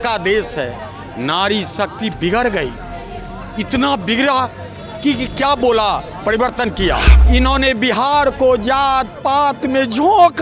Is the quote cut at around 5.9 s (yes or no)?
no